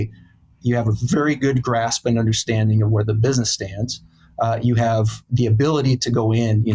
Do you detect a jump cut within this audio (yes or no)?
no